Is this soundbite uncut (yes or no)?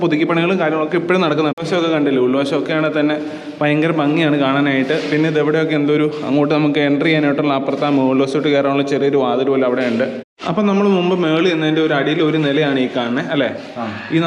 yes